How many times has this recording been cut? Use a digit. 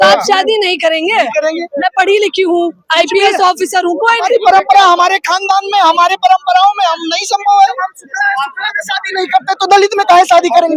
0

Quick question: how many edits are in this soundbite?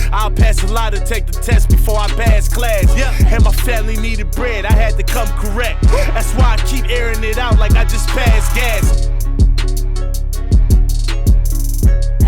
0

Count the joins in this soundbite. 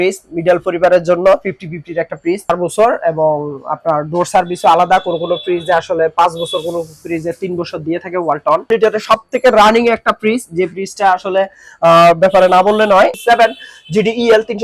3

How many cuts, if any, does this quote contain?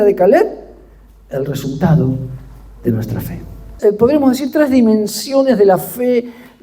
1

